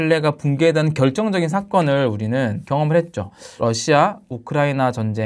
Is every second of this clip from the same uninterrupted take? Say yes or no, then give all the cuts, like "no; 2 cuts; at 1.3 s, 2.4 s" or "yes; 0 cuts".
no; 2 cuts; at 2.6 s, 3.4 s